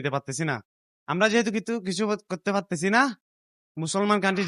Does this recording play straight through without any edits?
yes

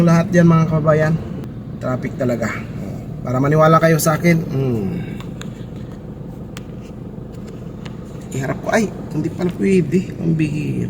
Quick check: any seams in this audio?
yes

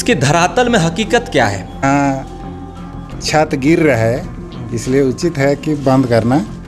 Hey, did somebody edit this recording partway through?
yes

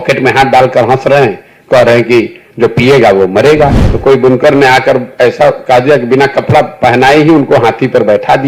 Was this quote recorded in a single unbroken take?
no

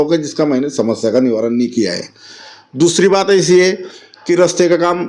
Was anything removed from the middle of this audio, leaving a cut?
no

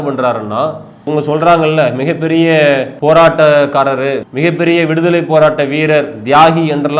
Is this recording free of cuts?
no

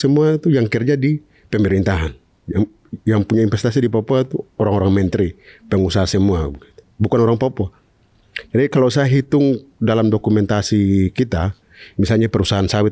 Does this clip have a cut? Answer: no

